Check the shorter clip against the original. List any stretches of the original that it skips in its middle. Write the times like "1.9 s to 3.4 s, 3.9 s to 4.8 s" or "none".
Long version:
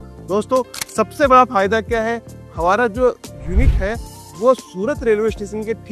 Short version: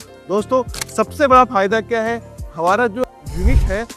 3.0 s to 3.2 s